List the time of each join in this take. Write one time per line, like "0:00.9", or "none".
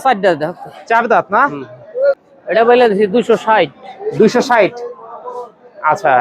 0:02.1